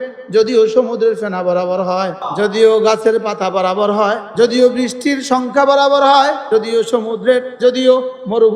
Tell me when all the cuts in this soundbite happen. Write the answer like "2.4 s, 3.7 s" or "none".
2.3 s, 4.2 s, 6.4 s, 7.5 s